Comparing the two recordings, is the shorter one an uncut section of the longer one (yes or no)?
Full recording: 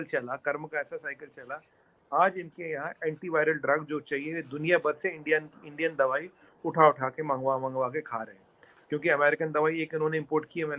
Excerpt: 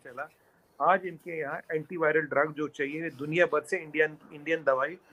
yes